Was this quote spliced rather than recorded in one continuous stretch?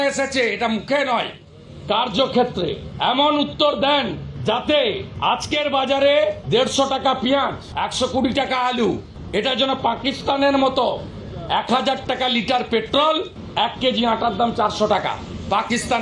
yes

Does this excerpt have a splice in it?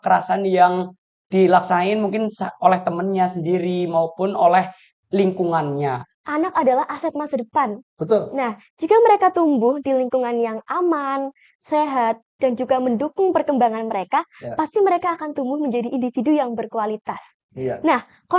yes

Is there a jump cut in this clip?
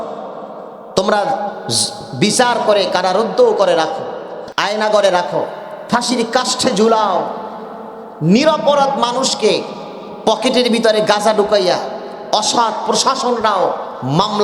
yes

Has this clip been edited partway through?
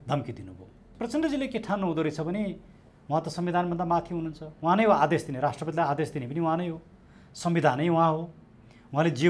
yes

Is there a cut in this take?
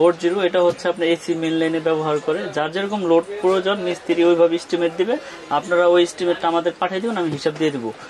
no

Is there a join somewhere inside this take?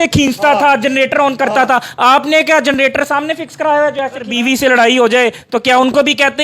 yes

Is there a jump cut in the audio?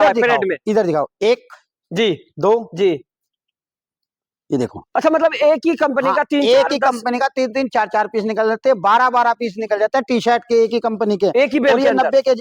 no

